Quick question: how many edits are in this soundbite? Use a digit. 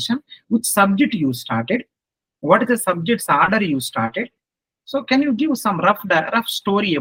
0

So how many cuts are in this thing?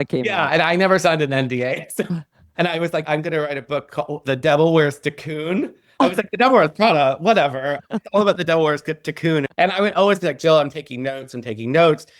1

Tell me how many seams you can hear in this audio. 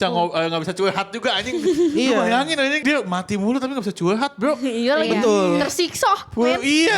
1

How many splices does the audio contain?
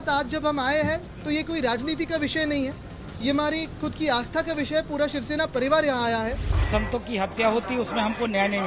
1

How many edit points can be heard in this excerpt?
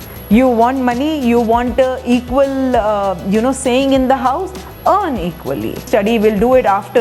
1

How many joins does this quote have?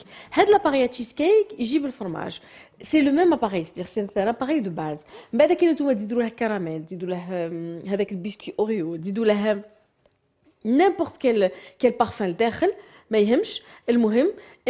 1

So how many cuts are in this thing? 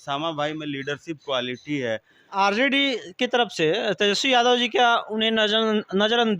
1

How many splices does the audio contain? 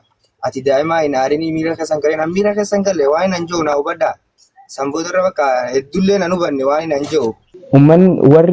1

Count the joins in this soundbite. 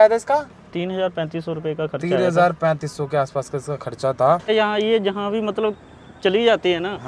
1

